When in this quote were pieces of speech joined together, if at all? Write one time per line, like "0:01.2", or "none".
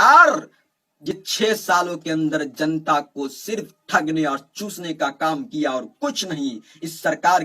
0:01.1